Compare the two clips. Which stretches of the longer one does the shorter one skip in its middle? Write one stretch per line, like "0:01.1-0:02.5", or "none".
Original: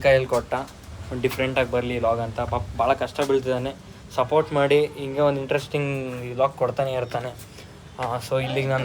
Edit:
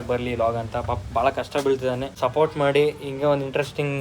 0:03.7-0:04.0